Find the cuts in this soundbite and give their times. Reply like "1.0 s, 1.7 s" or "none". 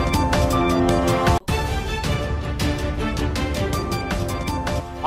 none

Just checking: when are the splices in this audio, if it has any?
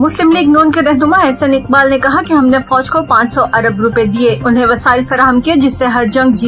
none

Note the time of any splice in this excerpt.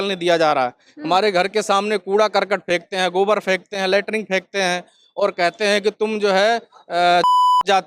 none

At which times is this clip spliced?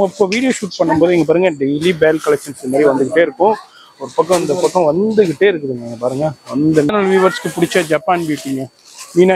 6.9 s

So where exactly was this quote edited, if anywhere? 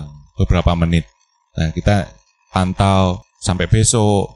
3.2 s

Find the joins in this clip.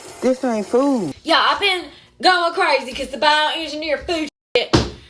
1.2 s

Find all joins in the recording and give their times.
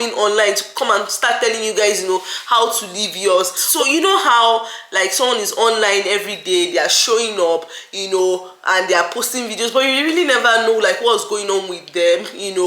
3.6 s

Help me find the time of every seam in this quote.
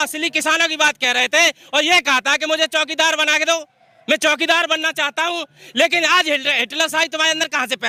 none

